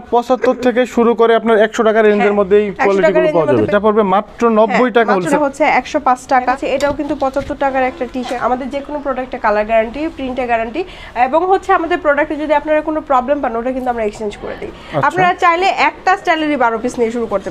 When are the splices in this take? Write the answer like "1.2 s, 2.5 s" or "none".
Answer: 3.7 s, 5.3 s, 6.6 s, 8.3 s, 14.7 s